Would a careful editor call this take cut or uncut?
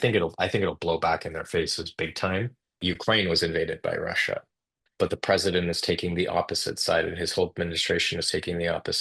cut